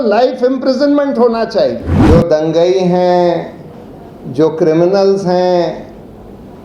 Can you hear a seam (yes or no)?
yes